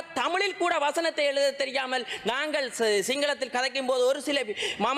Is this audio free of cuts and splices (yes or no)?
yes